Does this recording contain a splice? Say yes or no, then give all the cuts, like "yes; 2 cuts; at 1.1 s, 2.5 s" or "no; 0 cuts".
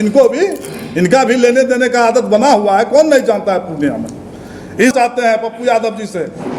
yes; 1 cut; at 4.9 s